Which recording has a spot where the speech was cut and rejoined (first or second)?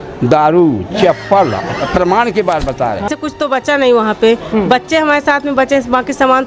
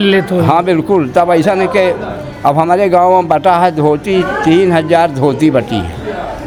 first